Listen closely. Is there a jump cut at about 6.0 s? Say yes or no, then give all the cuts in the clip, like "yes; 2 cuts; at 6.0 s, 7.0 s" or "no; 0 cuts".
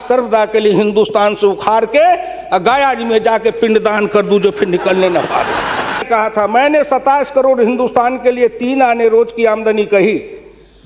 yes; 1 cut; at 6.0 s